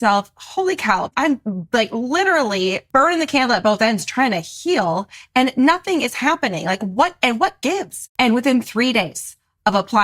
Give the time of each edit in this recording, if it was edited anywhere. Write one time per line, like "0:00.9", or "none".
0:01.1
0:02.8
0:08.0